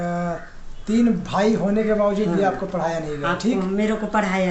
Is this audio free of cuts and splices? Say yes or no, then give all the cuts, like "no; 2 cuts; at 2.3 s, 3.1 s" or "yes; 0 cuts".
yes; 0 cuts